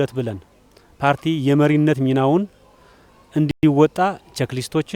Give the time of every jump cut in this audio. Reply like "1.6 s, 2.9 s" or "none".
none